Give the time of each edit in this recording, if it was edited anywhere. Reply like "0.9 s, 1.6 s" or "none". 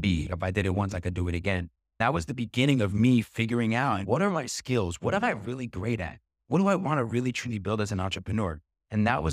2.0 s, 4.0 s